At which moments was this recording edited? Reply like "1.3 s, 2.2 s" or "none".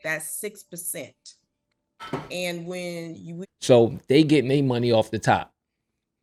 none